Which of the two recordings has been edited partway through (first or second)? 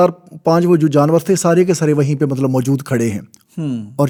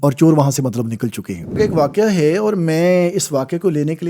second